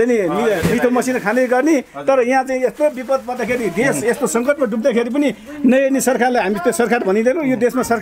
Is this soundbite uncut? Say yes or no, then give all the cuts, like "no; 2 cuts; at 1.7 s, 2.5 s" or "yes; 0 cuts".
yes; 0 cuts